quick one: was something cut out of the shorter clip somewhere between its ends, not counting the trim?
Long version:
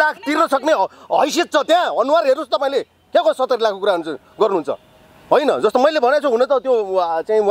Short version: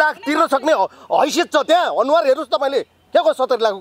no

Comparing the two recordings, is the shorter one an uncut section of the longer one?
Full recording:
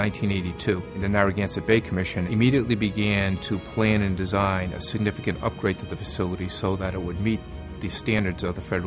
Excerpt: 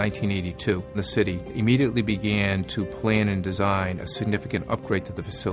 no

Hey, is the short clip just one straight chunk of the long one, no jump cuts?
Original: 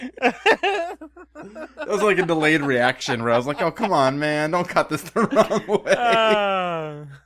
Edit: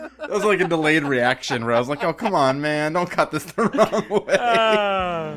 yes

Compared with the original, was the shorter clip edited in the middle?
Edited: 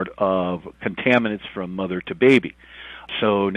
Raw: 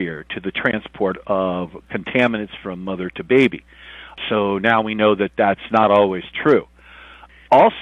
no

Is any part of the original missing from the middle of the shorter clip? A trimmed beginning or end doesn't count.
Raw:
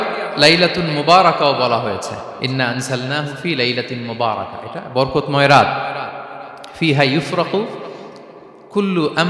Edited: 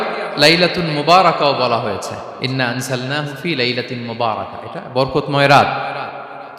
no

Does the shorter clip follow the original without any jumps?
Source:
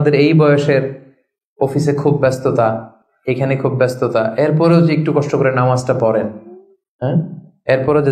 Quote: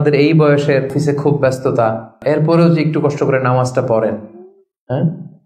no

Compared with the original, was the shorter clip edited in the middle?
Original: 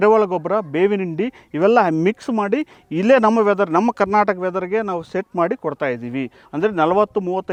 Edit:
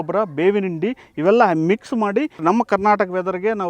yes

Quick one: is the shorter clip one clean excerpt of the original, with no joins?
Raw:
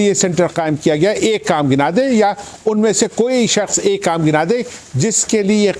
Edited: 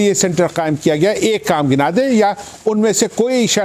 yes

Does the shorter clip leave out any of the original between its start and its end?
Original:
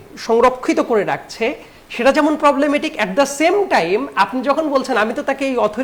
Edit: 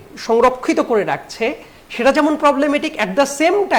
no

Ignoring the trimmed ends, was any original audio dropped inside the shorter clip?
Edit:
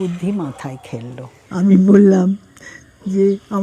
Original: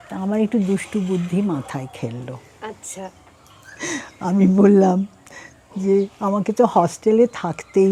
yes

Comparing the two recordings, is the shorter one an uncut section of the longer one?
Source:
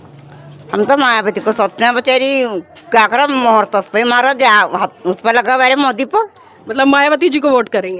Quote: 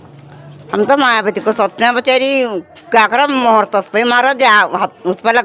yes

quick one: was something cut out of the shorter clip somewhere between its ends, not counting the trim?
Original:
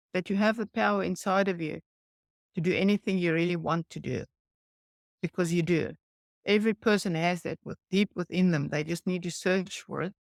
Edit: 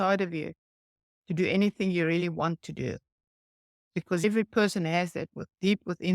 yes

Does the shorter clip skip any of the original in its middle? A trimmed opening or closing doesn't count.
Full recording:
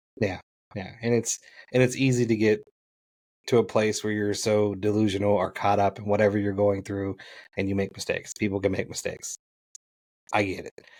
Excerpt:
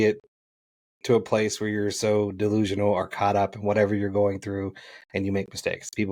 no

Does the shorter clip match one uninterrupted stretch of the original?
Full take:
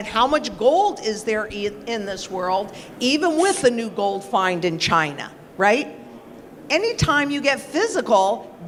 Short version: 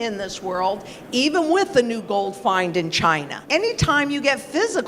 no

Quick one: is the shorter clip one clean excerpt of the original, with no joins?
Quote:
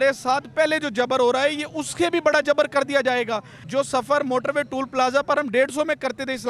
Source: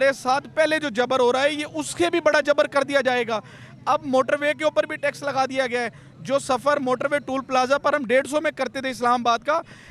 no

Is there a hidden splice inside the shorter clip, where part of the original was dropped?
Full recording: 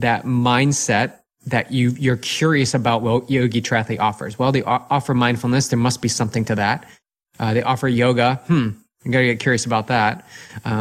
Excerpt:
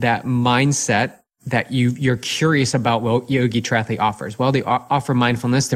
no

